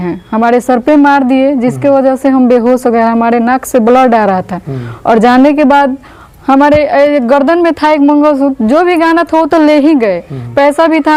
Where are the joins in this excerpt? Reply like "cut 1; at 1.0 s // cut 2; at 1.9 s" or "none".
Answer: none

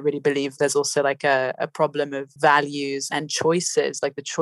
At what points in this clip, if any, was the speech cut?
cut 1; at 2.3 s

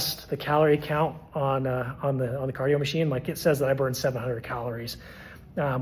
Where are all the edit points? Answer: none

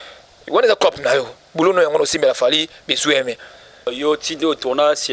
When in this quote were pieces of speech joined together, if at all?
cut 1; at 3.9 s

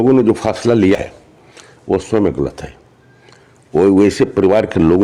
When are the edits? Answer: cut 1; at 1.0 s

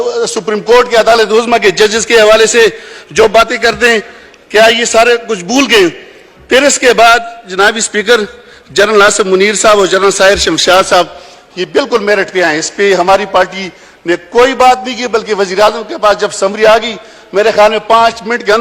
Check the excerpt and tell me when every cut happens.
none

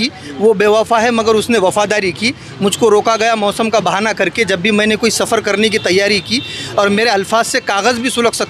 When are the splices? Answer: none

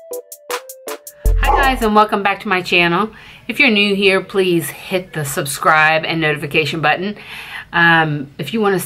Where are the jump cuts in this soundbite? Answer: cut 1; at 1.4 s

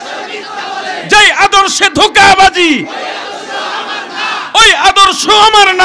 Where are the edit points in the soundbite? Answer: none

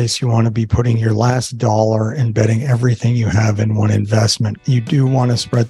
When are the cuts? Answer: cut 1; at 4.6 s

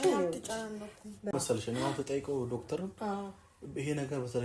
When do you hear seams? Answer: cut 1; at 1.3 s

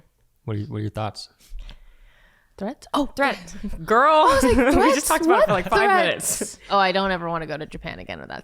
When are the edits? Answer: cut 1; at 6.7 s

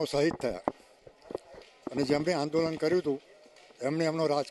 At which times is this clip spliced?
none

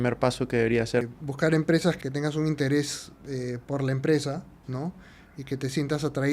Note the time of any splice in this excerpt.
cut 1; at 1.1 s // cut 2; at 2.0 s

